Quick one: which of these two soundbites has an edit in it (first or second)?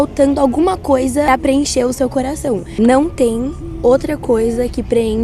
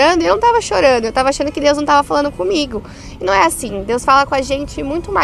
first